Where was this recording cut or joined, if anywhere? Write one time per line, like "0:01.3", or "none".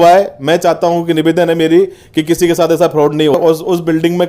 0:03.3